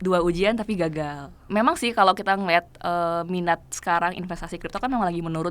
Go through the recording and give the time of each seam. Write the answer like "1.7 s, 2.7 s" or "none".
1.5 s